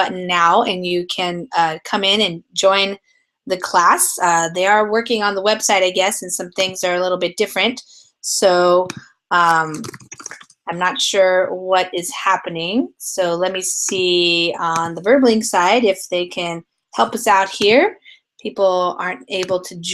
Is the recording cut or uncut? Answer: uncut